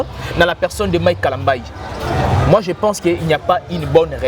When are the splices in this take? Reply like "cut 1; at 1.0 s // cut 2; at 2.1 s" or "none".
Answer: none